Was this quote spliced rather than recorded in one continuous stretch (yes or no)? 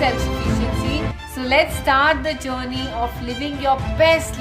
yes